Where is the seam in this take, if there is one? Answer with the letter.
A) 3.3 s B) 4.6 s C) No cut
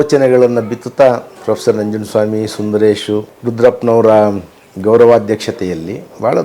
A